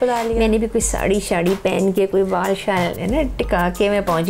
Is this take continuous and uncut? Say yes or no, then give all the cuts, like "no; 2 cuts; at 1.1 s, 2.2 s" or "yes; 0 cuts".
yes; 0 cuts